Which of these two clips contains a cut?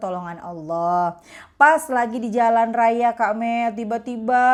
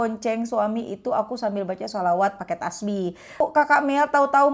second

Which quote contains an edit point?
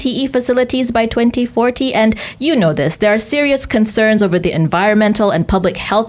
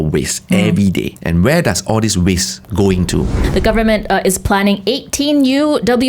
second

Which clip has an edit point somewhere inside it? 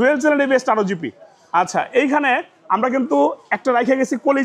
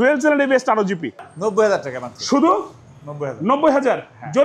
second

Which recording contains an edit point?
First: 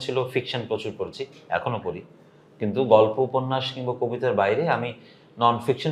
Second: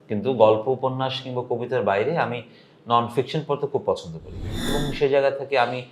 second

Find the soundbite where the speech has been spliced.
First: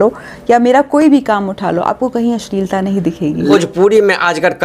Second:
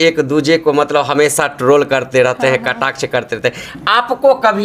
first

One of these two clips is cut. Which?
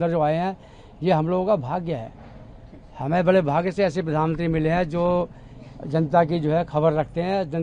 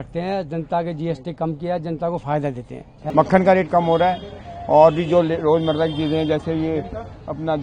second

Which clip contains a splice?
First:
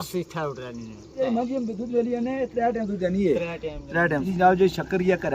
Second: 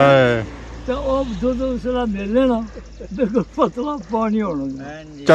first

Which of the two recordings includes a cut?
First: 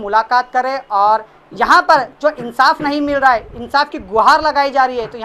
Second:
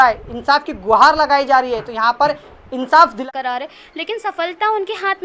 second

